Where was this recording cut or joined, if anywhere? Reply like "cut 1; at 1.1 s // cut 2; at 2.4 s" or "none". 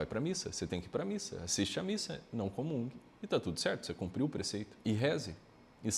cut 1; at 4.7 s